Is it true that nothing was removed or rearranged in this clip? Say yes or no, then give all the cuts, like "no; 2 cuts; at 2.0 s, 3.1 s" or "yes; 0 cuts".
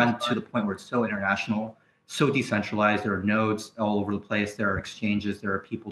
yes; 0 cuts